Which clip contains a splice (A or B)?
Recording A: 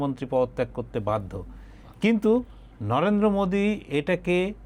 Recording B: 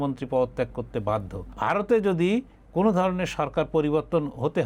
B